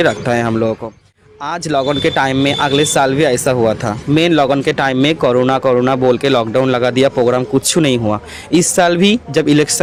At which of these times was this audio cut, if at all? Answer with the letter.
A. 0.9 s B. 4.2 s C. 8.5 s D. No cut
D